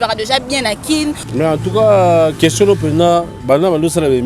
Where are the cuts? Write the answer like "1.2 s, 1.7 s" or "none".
1.2 s